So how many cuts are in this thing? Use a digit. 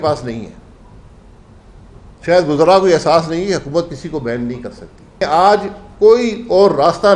1